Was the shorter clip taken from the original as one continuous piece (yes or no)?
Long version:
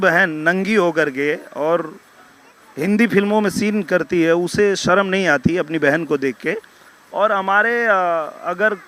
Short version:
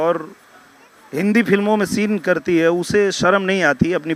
yes